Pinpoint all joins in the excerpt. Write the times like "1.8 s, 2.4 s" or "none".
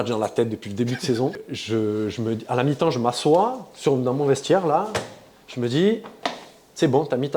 1.5 s